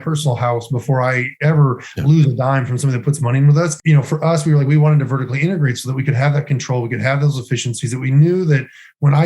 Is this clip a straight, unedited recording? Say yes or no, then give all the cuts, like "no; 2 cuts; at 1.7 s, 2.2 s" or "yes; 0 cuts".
no; 1 cut; at 3.8 s